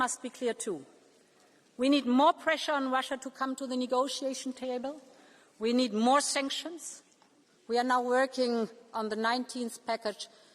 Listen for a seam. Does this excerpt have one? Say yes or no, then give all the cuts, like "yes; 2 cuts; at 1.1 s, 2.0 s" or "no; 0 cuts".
no; 0 cuts